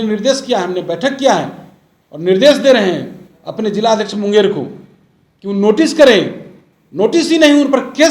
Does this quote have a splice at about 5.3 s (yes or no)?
no